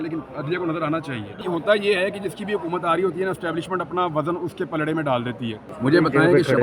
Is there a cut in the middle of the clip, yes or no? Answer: yes